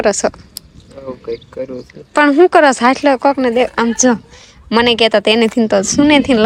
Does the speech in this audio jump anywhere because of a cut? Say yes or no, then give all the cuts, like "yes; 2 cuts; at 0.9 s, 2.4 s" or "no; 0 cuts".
no; 0 cuts